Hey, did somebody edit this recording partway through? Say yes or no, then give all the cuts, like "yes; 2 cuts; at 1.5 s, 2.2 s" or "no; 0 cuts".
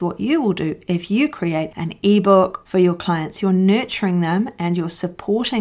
yes; 1 cut; at 2.6 s